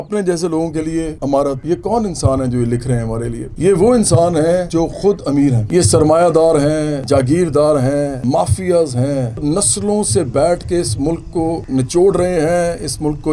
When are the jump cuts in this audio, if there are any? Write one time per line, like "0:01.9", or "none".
0:01.6
0:04.7
0:05.6
0:07.0
0:08.2
0:09.4
0:11.6